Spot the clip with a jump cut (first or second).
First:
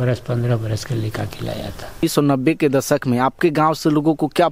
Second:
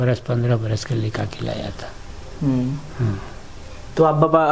first